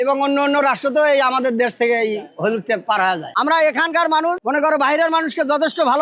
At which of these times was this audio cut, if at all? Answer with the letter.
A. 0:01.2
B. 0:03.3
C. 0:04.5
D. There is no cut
B